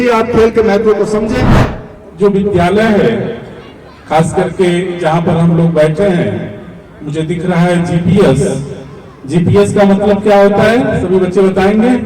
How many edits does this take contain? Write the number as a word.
one